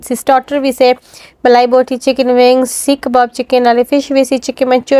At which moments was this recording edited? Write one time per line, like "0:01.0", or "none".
none